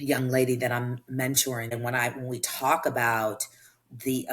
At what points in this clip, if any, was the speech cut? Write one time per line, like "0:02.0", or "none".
0:01.7